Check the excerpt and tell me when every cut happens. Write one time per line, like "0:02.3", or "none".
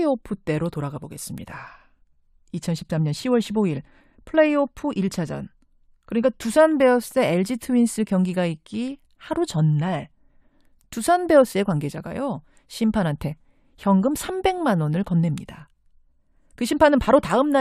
none